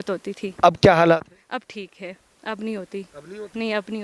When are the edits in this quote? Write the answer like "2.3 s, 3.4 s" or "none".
none